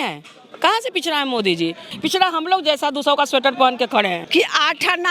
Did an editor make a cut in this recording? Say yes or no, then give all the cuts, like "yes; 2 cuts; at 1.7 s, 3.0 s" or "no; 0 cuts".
yes; 2 cuts; at 1.9 s, 4.2 s